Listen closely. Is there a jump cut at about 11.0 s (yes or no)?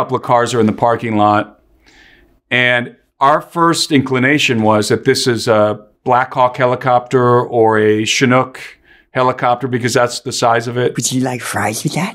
yes